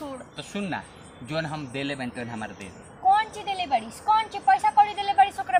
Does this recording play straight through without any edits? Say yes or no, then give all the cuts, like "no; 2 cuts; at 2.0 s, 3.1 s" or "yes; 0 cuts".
yes; 0 cuts